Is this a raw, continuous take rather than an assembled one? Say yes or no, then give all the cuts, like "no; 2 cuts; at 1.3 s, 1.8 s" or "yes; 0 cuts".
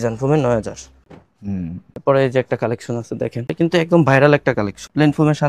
yes; 0 cuts